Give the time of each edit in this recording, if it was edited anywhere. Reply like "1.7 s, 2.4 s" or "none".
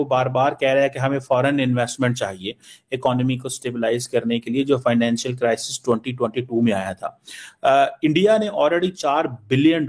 none